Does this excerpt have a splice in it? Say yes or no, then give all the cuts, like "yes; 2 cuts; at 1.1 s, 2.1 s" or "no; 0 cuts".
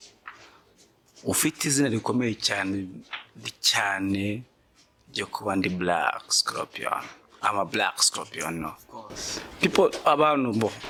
no; 0 cuts